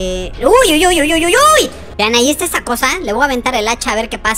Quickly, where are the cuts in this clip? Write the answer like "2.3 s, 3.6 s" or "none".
1.8 s